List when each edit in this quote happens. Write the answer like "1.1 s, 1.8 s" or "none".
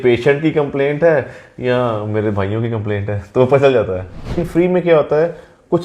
4.5 s

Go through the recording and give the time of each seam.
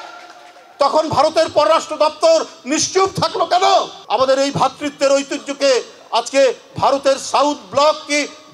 4.0 s

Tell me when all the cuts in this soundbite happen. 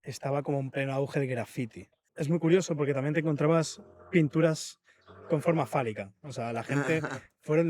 2.1 s

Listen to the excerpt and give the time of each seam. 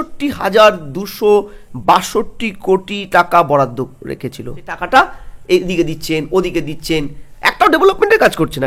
4.8 s

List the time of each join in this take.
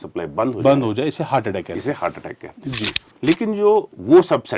3.1 s

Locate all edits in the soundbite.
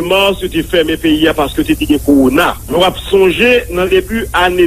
2.6 s

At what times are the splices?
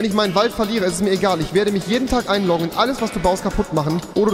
none

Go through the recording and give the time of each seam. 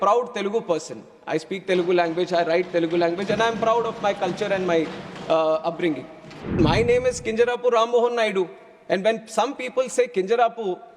6.5 s

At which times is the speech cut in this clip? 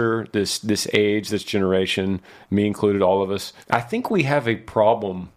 3.5 s

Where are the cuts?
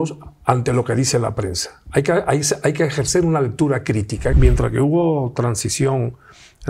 4.3 s

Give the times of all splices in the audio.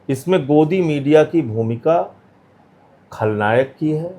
none

